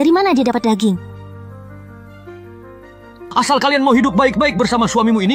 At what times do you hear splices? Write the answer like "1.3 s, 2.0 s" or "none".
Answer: 1.2 s, 3.3 s